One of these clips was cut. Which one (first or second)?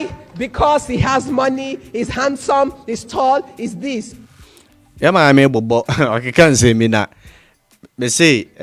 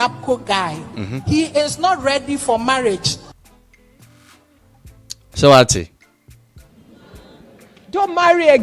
second